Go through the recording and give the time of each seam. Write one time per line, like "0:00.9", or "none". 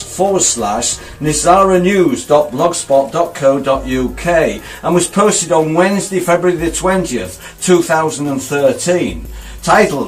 none